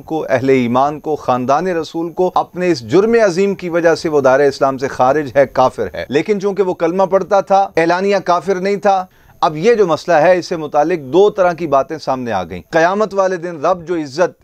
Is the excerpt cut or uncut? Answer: cut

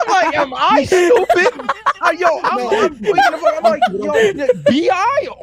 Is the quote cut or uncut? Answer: uncut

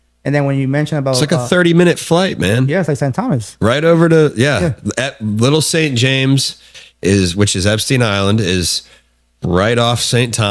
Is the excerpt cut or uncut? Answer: uncut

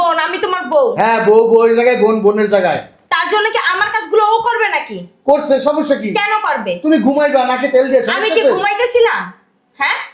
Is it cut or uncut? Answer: uncut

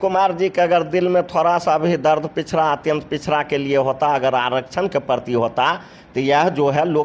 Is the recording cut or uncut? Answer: uncut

